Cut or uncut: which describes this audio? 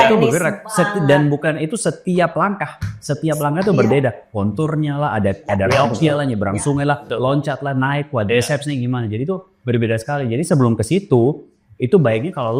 uncut